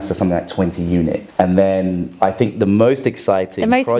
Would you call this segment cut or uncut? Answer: cut